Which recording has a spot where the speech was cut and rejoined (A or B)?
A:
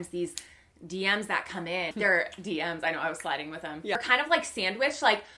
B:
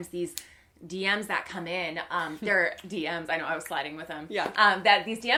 A